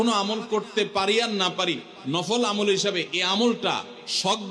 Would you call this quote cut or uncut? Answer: uncut